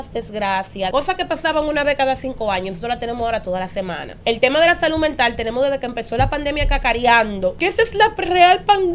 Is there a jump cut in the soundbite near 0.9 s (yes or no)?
yes